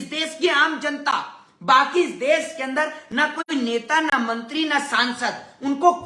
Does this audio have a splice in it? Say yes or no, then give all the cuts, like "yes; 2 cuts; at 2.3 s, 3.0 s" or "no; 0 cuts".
no; 0 cuts